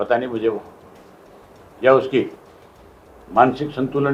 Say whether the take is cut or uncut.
uncut